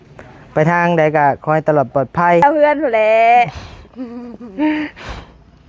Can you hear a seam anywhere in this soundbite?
yes; 1 cut; at 2.4 s

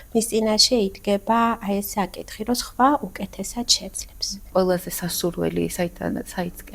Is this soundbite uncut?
no; 1 cut; at 4.5 s

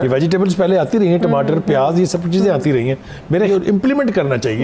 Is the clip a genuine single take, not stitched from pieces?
no; 1 cut; at 3.5 s

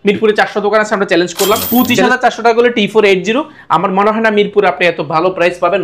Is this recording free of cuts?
no; 1 cut; at 1.6 s

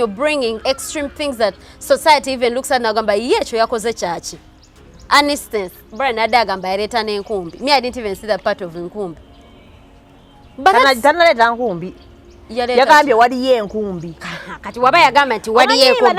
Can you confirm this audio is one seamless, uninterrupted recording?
yes; 0 cuts

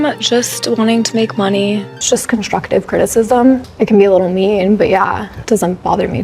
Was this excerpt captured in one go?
no; 3 cuts; at 1.9 s, 3.7 s, 5.3 s

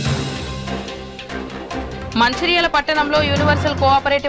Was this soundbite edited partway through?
yes; 1 cut; at 1.6 s

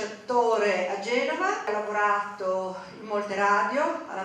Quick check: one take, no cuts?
no; 1 cut; at 1.7 s

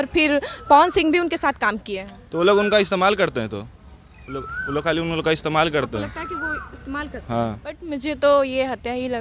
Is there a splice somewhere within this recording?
yes; 1 cut; at 7.9 s

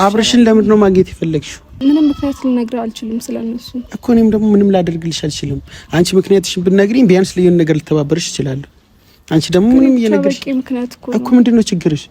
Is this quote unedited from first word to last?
no; 1 cut; at 1.6 s

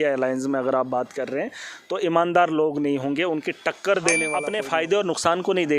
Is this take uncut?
no; 1 cut; at 4.4 s

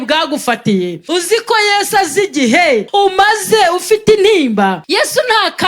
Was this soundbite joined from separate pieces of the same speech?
yes; 3 cuts; at 1.0 s, 2.9 s, 4.8 s

